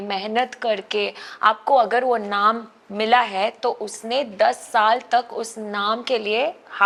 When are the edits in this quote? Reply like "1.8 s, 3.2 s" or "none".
none